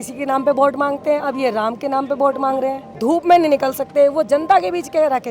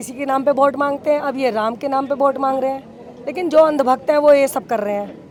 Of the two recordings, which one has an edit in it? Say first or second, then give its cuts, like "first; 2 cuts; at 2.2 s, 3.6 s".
first; 1 cut; at 2.9 s